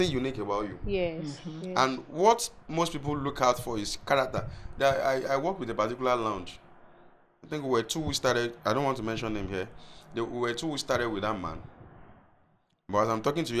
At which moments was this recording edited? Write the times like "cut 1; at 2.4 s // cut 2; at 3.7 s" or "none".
none